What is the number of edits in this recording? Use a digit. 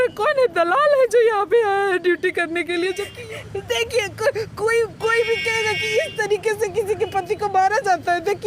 1